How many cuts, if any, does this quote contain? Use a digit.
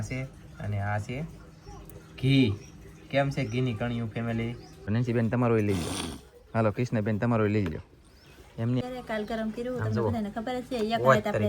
2